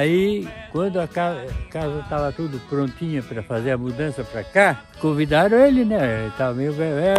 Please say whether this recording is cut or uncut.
cut